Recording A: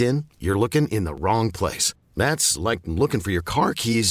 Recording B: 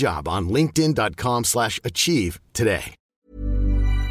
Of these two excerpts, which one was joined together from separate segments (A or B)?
B